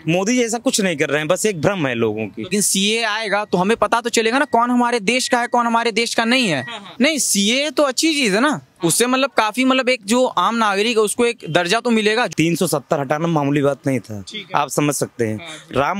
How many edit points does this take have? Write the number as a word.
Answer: three